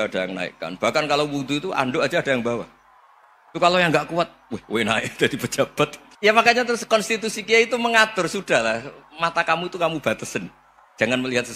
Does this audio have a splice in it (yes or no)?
yes